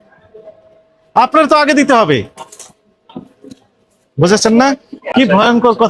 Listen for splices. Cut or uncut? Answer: cut